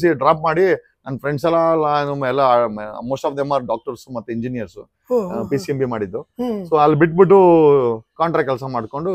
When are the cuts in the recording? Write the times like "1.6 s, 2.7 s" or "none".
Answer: none